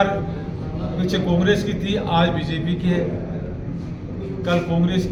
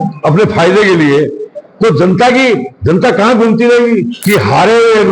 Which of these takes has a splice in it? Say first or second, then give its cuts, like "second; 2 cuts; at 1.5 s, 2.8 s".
second; 1 cut; at 4.1 s